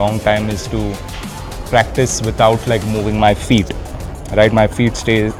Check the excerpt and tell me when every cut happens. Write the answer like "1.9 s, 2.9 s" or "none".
none

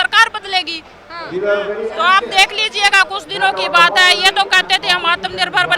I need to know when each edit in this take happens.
none

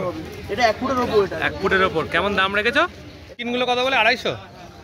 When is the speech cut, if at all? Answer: 3.4 s

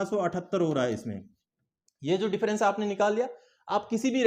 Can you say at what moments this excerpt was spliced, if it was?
none

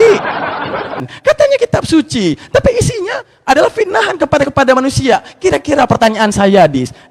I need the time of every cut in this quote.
1.0 s

